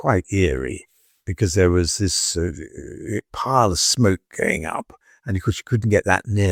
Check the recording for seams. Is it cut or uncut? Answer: uncut